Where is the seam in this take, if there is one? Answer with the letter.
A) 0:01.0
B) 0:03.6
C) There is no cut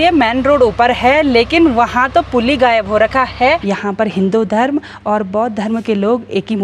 B